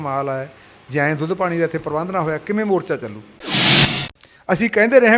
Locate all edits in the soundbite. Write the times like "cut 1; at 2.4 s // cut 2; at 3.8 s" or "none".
cut 1; at 3.7 s